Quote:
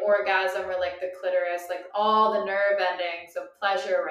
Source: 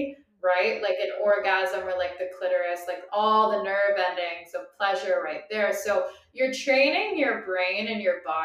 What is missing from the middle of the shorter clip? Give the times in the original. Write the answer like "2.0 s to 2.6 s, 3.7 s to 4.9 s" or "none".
none